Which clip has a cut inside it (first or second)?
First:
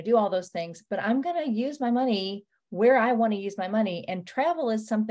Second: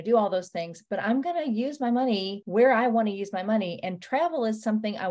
second